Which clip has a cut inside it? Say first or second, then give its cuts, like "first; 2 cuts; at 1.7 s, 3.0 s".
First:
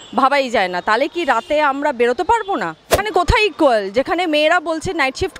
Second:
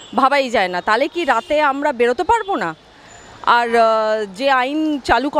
first; 1 cut; at 3.1 s